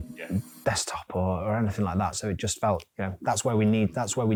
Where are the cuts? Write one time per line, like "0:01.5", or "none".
none